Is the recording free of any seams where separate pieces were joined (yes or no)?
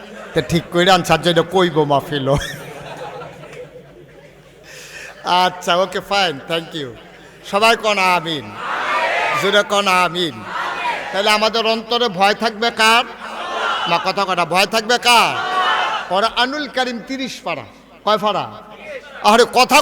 yes